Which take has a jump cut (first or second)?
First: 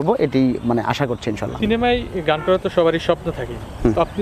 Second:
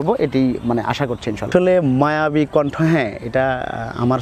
second